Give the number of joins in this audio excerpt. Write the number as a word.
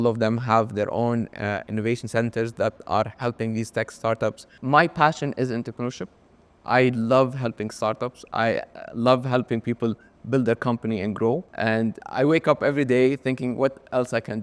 two